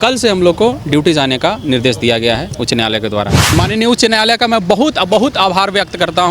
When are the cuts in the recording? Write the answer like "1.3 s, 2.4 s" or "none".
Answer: 3.5 s